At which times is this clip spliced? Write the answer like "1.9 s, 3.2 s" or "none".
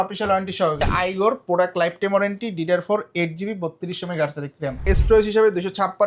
0.8 s, 4.8 s